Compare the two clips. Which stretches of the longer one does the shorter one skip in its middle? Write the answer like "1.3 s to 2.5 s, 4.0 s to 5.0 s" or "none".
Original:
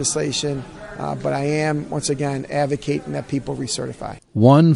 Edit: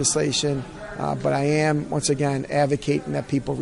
none